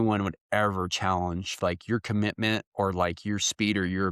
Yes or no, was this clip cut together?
no